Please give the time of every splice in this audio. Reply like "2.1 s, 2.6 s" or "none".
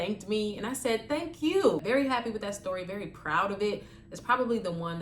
1.8 s